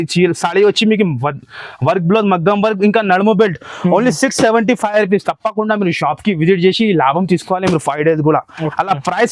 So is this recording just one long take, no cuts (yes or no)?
yes